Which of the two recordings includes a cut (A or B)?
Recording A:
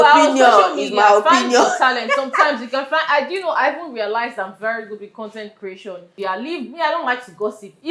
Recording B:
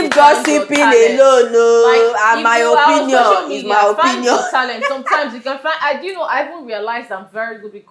A